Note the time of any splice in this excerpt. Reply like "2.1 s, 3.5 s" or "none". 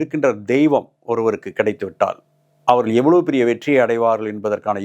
none